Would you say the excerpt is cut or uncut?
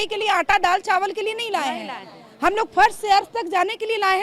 uncut